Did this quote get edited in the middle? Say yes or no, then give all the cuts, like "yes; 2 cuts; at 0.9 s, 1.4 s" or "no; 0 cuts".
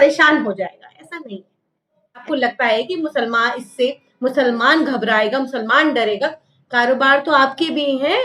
yes; 1 cut; at 2.2 s